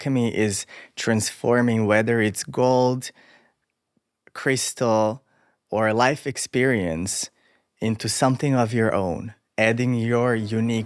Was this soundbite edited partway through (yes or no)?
no